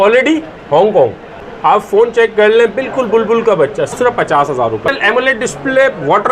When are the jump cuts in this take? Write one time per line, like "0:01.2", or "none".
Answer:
0:01.4
0:03.9
0:04.9